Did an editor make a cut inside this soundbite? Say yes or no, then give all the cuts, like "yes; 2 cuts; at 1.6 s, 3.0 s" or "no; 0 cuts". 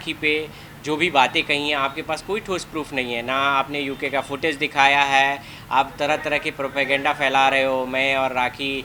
no; 0 cuts